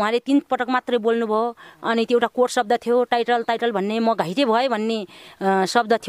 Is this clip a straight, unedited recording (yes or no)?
yes